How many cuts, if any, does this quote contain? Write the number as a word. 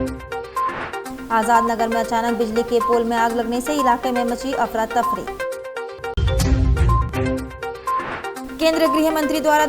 one